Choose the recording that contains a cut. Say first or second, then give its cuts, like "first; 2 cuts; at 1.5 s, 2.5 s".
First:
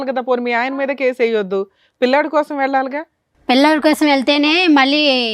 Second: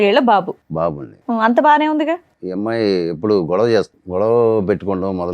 second; 2 cuts; at 2.4 s, 4.0 s